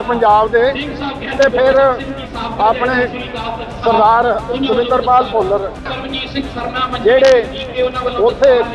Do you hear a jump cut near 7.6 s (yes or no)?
no